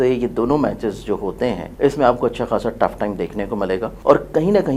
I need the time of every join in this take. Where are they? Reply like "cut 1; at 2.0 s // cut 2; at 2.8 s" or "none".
cut 1; at 1.7 s // cut 2; at 3.9 s